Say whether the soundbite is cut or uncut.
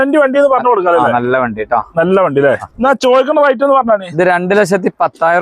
cut